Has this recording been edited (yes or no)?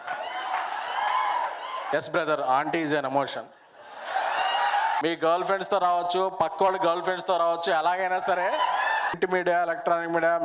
yes